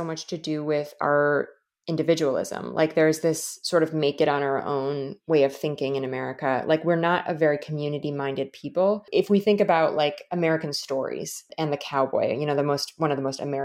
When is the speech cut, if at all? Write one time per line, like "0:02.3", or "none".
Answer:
0:09.0
0:11.5